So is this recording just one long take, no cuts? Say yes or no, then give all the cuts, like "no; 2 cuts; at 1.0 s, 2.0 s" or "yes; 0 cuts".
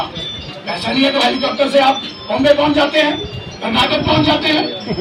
yes; 0 cuts